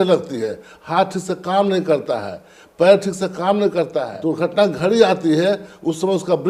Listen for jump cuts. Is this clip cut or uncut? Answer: cut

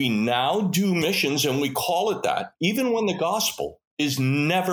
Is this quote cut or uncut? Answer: cut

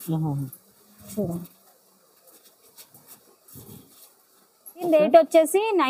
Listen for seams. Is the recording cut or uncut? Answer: cut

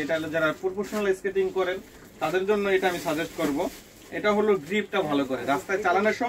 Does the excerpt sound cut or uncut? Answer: uncut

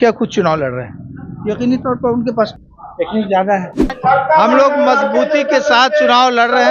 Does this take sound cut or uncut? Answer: cut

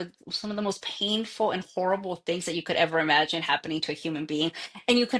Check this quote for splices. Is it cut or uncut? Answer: uncut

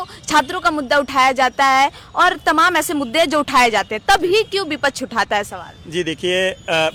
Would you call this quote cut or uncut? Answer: uncut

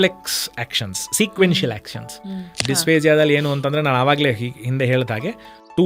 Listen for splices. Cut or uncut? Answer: cut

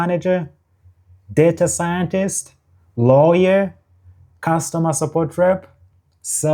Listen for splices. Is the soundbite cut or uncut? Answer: uncut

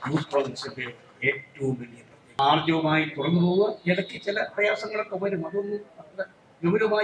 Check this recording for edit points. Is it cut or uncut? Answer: cut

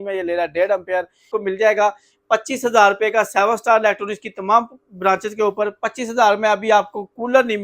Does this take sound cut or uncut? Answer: cut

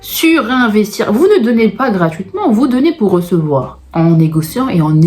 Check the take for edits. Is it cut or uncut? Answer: cut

